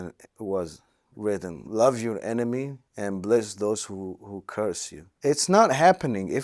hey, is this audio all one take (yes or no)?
no